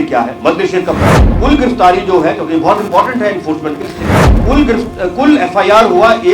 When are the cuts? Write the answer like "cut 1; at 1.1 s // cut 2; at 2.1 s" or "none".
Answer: cut 1; at 1.3 s // cut 2; at 4.3 s